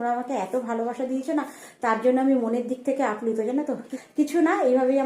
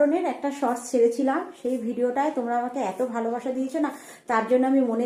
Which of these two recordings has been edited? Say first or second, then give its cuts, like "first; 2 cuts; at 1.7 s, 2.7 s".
first; 1 cut; at 4.0 s